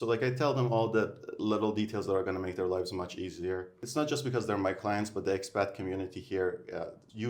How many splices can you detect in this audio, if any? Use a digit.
1